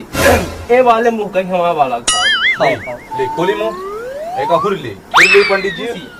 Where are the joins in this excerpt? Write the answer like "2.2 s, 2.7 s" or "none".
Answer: none